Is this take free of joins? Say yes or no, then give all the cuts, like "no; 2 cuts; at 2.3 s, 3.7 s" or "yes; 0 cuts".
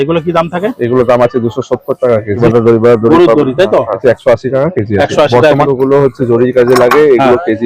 no; 3 cuts; at 2.4 s, 4.0 s, 5.6 s